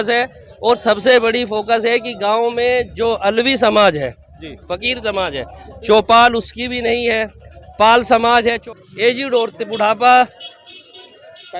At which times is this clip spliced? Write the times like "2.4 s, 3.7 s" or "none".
8.7 s

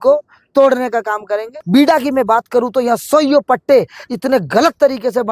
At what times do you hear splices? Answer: 1.5 s

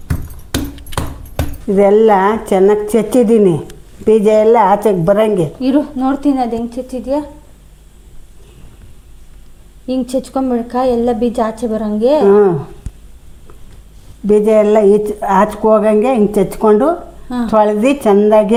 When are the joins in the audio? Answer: none

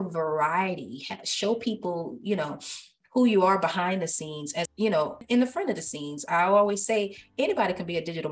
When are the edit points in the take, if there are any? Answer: none

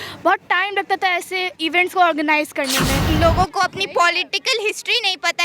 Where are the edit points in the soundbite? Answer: 3.0 s

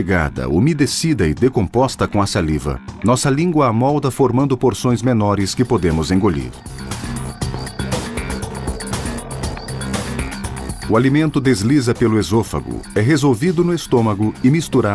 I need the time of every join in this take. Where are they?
11.3 s

